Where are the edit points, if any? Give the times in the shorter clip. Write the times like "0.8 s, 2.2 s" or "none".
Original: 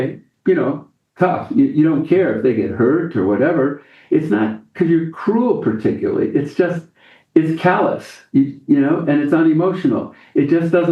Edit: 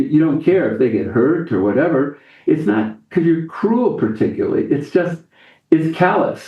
none